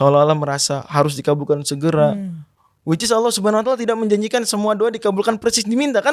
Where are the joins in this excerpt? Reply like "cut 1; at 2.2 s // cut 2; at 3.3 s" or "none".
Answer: none